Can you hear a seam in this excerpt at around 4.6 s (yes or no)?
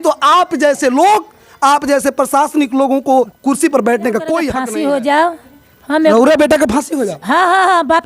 yes